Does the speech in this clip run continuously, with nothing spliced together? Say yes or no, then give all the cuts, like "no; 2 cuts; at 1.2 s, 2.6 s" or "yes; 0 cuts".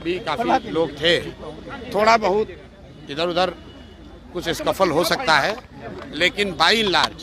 yes; 0 cuts